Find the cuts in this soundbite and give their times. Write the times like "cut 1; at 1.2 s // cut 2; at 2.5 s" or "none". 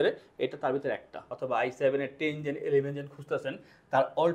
cut 1; at 1.3 s